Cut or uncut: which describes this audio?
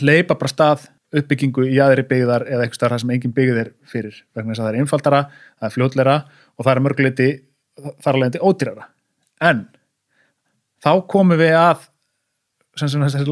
cut